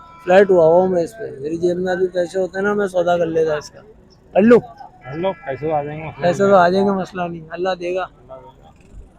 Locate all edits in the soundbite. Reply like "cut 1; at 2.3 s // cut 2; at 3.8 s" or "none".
none